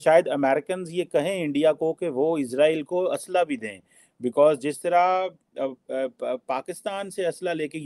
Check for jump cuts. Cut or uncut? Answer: uncut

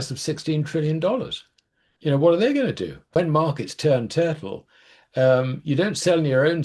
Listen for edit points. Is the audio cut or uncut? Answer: cut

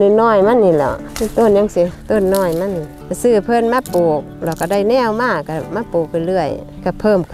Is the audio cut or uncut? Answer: uncut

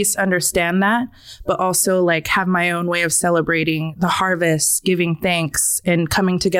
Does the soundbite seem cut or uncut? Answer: uncut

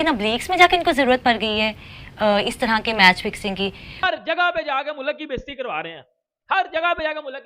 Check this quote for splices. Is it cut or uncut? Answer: cut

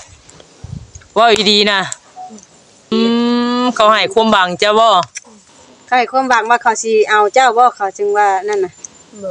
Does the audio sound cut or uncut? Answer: cut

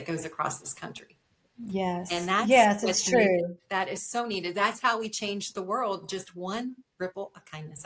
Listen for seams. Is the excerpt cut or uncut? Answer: uncut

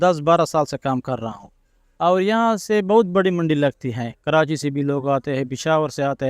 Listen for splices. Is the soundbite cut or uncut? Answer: uncut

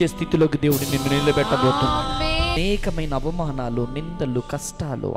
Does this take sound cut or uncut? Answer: cut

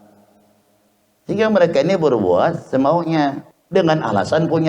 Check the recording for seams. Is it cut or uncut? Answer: cut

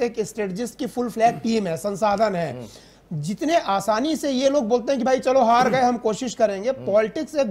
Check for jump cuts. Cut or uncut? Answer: uncut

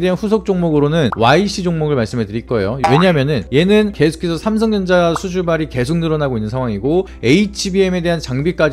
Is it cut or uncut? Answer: cut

